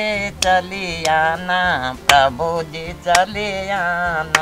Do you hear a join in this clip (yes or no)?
no